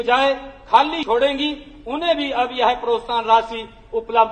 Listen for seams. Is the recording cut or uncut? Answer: cut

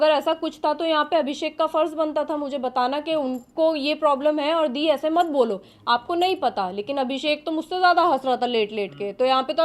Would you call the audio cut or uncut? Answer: uncut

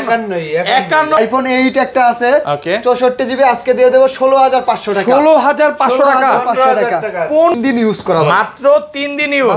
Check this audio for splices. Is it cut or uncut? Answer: cut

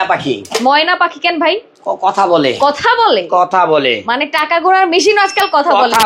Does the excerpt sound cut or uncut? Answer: uncut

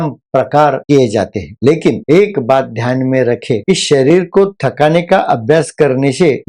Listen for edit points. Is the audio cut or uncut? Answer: uncut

